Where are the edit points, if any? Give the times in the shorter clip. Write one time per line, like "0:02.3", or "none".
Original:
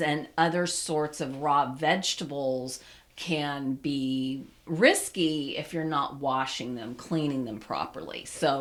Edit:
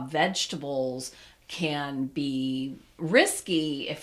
none